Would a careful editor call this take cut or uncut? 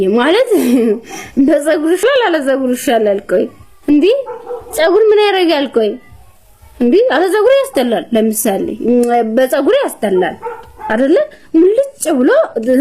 cut